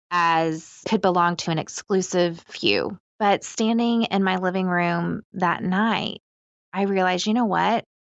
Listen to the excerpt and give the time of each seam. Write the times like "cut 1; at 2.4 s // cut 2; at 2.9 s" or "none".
cut 1; at 3.0 s